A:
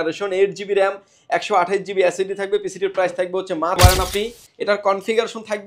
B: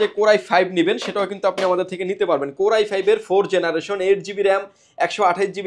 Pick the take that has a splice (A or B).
A